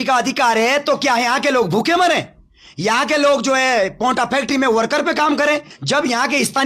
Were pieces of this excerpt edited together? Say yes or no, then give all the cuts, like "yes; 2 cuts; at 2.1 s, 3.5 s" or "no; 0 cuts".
yes; 1 cut; at 5.7 s